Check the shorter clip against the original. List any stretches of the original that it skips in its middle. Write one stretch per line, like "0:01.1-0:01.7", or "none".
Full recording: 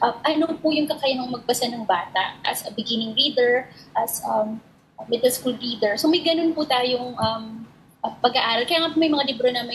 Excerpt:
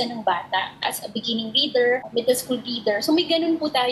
0:03.7-0:05.0